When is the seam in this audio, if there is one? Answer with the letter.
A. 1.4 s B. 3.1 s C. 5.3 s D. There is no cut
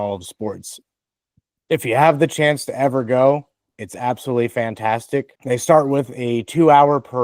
C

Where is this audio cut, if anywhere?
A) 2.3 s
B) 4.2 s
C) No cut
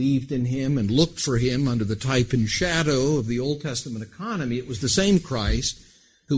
C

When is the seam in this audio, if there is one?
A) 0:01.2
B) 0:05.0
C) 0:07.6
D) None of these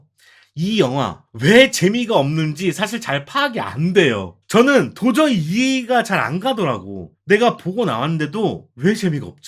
D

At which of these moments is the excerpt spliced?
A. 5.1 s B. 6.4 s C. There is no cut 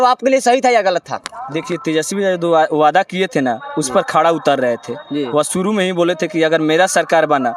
C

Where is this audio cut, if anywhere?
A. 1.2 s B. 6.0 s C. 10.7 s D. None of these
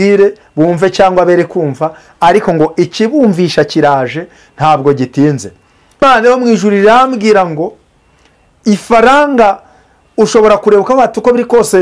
B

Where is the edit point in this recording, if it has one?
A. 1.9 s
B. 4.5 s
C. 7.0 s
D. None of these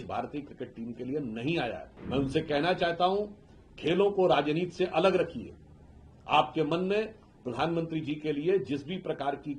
A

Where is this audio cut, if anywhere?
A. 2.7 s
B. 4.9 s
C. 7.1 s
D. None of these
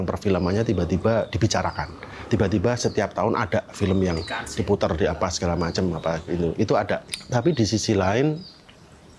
C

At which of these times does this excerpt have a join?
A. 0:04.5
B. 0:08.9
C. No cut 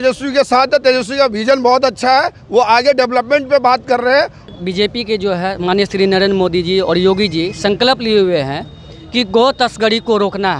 A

